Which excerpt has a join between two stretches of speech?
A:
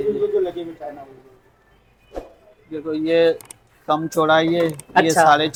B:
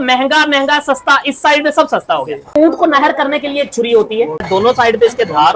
B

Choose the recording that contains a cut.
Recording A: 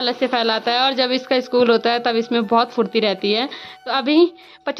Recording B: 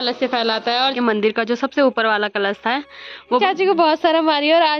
B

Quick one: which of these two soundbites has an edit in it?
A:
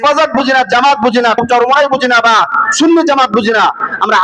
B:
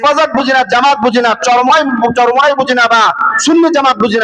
A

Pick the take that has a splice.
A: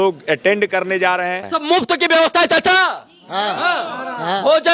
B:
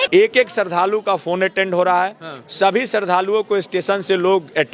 A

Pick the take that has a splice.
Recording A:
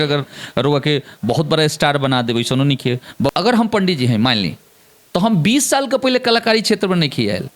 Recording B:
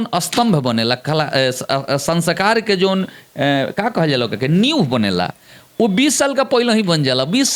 A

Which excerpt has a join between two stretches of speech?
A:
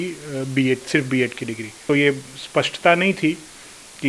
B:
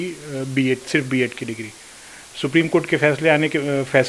A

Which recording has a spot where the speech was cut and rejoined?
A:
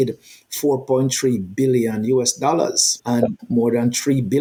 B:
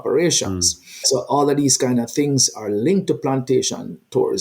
B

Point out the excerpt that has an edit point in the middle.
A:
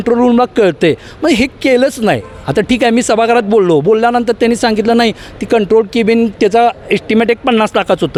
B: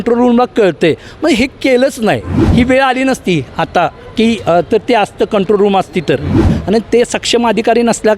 B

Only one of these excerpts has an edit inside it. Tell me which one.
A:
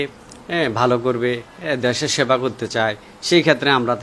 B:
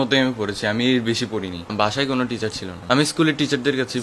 B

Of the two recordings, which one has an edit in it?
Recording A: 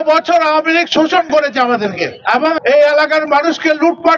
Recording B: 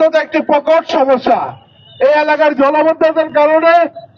A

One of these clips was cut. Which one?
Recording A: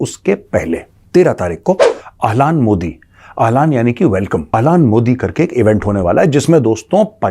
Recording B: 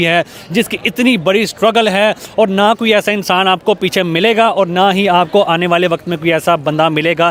A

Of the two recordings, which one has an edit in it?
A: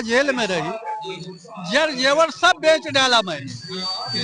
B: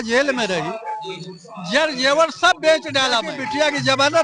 B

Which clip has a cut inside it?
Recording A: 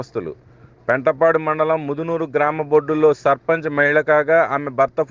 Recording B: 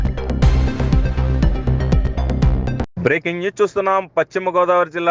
B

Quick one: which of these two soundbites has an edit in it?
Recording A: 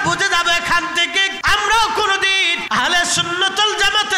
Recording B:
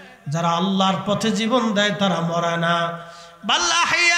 A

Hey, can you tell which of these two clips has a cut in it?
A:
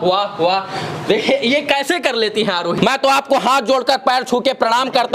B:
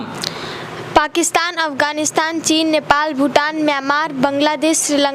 A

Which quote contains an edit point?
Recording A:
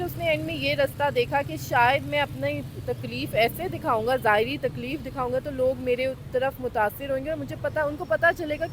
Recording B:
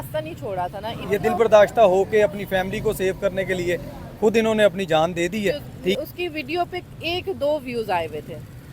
B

